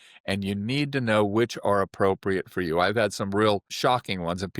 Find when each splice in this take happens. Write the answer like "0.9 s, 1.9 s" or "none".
3.7 s